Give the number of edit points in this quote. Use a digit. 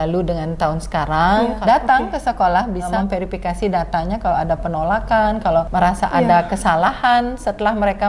3